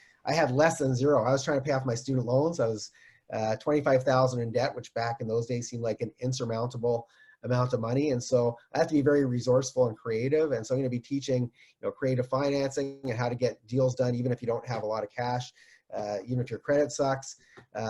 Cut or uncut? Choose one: uncut